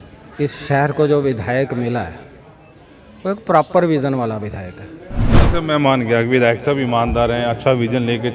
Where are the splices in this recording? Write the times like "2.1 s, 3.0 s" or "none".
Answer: 5.3 s